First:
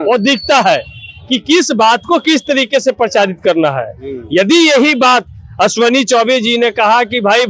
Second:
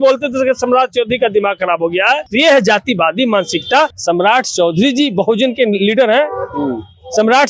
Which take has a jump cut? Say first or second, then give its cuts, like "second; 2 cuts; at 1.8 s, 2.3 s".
second; 2 cuts; at 2.3 s, 4.0 s